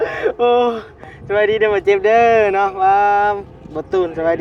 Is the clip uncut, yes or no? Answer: yes